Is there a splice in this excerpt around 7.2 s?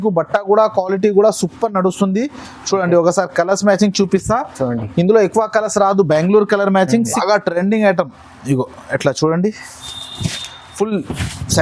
yes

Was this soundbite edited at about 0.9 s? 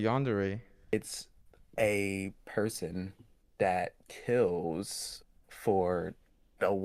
yes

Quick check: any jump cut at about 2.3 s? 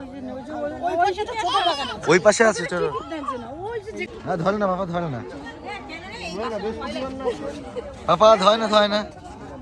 no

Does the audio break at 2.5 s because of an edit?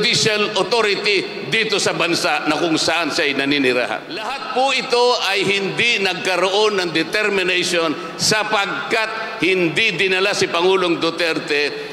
no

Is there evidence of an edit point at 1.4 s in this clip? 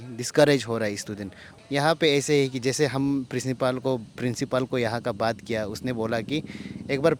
yes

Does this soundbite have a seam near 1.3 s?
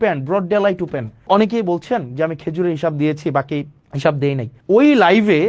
yes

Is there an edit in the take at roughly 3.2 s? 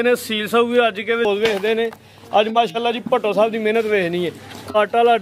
no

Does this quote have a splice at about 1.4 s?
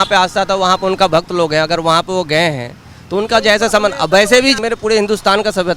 no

